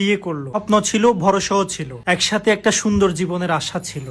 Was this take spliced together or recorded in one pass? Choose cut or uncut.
uncut